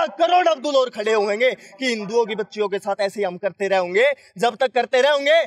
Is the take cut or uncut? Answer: uncut